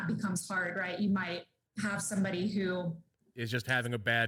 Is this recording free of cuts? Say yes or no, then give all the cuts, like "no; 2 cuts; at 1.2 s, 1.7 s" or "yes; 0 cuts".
yes; 0 cuts